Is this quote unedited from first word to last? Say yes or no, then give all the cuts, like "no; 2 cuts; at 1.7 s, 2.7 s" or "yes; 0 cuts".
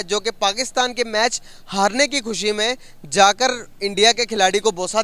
yes; 0 cuts